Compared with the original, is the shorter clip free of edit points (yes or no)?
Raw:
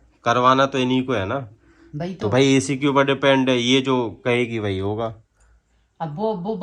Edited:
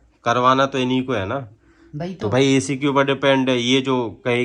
yes